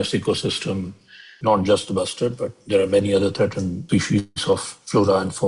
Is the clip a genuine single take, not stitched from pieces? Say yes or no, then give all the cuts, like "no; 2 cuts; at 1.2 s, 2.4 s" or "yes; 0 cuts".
no; 2 cuts; at 1.3 s, 3.8 s